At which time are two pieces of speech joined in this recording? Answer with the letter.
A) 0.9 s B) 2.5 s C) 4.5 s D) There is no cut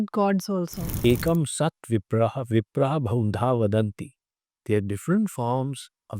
A